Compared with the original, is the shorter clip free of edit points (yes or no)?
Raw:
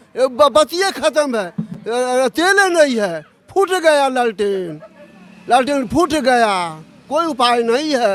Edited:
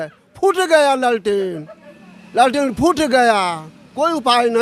yes